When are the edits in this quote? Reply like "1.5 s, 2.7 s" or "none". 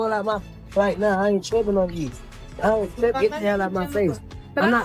3.3 s